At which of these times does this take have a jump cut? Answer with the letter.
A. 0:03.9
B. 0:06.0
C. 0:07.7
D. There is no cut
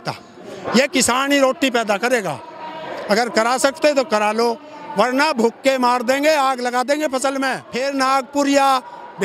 C